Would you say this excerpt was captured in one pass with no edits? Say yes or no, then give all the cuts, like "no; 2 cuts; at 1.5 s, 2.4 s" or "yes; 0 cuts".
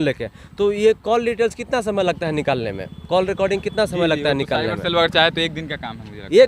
yes; 0 cuts